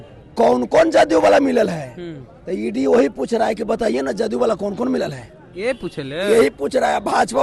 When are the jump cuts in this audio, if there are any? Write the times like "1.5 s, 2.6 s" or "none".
none